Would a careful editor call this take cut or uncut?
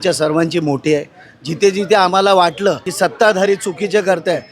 cut